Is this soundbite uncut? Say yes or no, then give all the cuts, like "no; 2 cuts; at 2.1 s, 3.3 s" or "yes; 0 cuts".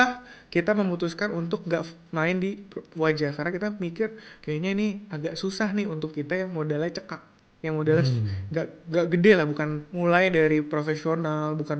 no; 1 cut; at 9.8 s